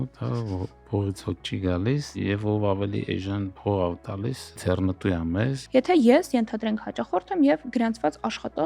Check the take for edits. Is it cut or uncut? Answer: cut